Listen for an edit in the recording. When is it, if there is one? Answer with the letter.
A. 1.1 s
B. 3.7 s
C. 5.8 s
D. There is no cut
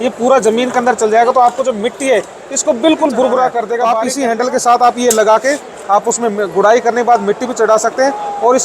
B